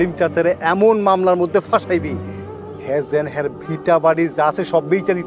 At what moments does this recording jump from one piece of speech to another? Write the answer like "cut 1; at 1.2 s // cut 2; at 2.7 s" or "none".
none